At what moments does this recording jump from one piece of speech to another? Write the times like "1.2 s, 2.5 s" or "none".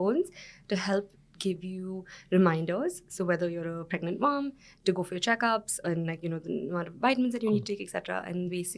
none